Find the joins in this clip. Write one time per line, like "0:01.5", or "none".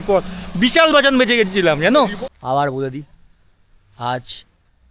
0:02.3